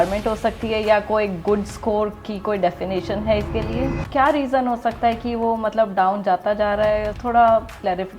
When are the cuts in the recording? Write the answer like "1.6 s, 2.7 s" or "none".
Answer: 4.0 s

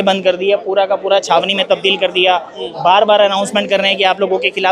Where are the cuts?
none

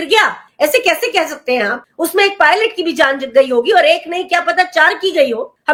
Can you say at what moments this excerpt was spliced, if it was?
none

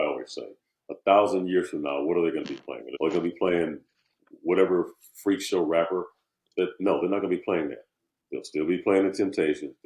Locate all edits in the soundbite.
2.8 s

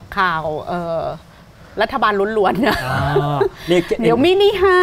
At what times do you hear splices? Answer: none

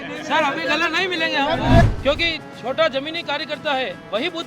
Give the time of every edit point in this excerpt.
1.8 s

